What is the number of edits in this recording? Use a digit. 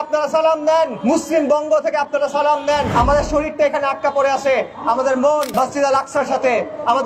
3